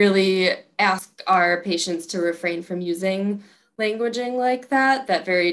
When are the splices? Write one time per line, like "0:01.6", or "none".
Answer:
0:01.1